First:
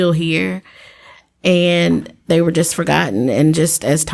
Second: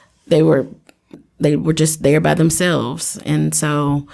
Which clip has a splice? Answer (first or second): second